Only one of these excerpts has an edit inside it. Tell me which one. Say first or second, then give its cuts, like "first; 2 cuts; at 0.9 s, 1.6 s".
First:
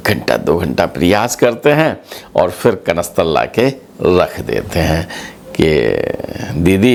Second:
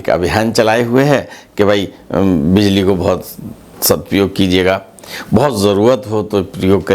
second; 1 cut; at 3.7 s